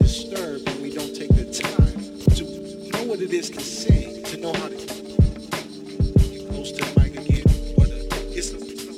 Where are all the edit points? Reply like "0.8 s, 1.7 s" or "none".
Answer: none